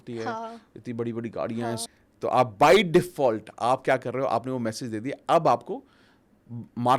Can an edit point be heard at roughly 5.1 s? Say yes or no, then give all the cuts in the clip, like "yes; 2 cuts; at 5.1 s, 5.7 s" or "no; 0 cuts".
no; 1 cut; at 1.9 s